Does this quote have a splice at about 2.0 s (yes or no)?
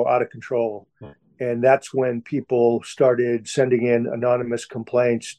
no